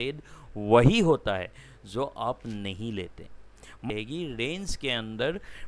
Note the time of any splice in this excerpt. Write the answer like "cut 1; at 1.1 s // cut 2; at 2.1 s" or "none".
cut 1; at 3.9 s